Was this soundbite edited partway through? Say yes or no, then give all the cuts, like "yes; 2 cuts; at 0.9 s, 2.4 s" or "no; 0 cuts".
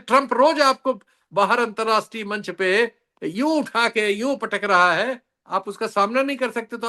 no; 0 cuts